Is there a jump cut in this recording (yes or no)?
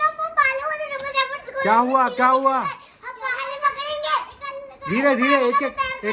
no